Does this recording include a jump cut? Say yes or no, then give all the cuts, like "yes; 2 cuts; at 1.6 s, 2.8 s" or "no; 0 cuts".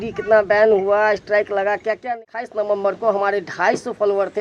yes; 1 cut; at 2.1 s